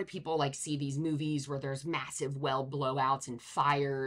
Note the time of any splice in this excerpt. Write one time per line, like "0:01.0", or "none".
none